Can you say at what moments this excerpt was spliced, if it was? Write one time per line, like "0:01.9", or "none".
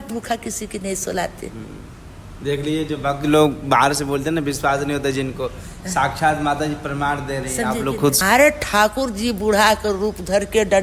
0:08.2